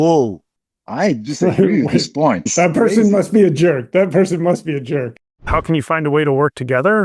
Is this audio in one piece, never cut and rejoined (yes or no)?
no